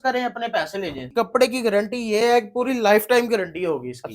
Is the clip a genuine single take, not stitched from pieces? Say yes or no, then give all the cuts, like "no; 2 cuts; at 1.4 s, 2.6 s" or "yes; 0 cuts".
no; 1 cut; at 1.0 s